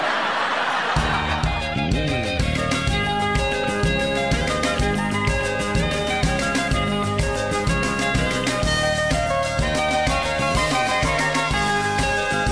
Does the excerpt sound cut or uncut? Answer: uncut